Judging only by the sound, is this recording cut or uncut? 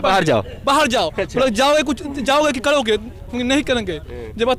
uncut